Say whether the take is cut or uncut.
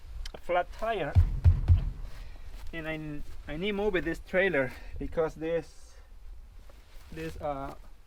uncut